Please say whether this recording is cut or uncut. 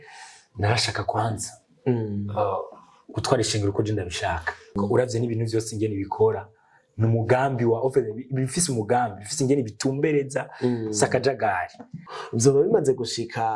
cut